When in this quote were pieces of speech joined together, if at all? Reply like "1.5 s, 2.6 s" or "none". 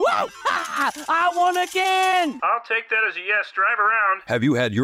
none